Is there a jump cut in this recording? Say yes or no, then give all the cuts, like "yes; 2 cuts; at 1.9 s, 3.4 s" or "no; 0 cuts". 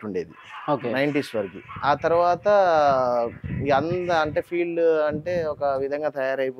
no; 0 cuts